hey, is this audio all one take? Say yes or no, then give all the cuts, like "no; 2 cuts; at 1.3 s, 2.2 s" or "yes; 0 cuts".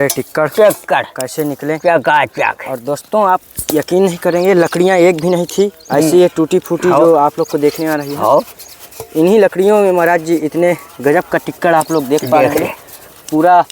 yes; 0 cuts